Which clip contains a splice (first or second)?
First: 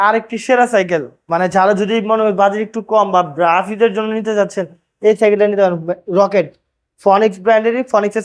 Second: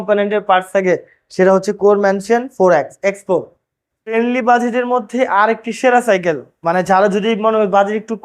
second